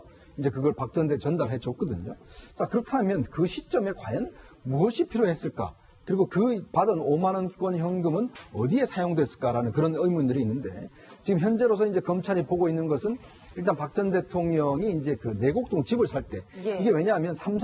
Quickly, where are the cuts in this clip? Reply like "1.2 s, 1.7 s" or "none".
none

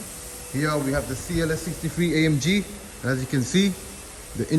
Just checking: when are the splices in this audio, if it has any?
none

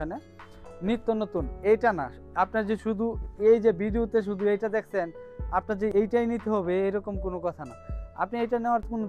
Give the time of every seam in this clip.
none

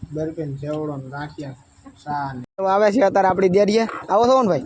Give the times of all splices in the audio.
2.7 s

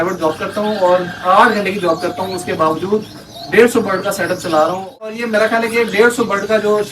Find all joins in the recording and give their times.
5.1 s

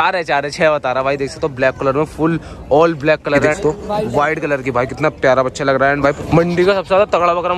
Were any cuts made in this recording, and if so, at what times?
3.6 s, 6.2 s

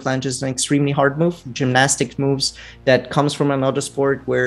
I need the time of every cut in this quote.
1.5 s

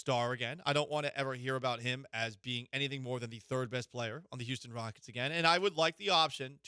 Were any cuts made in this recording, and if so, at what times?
none

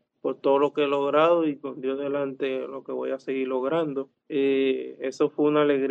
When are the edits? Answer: 4.2 s

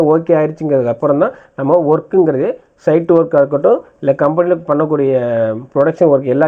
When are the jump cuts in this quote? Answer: none

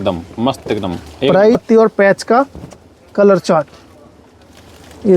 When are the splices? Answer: 1.6 s

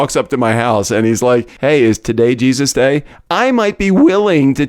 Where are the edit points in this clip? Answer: 1.5 s

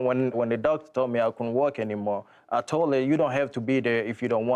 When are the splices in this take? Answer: none

